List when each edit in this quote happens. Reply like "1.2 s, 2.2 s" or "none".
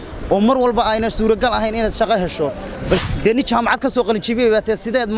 3.0 s